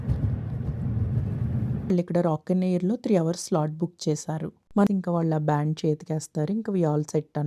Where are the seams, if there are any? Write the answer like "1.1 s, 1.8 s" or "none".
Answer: 1.9 s, 4.9 s